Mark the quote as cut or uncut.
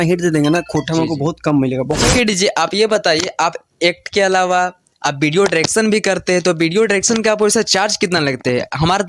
cut